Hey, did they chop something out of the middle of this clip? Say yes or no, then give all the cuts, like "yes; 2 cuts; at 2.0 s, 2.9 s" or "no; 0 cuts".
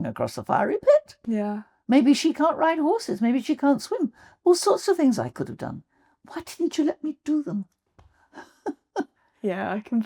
no; 0 cuts